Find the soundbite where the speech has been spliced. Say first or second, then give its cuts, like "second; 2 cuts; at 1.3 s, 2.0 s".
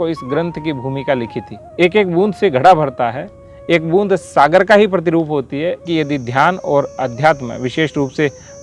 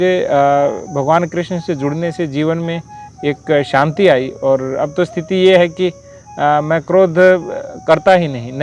first; 2 cuts; at 1.6 s, 5.9 s